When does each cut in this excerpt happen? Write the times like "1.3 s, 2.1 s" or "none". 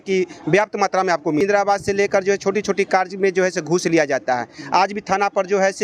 1.4 s